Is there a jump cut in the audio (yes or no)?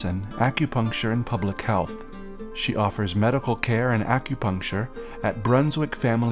no